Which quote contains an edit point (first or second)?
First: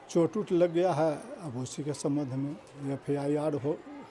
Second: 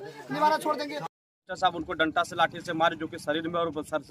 second